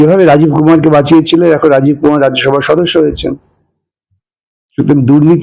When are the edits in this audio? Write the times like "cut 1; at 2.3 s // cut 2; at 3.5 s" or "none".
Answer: none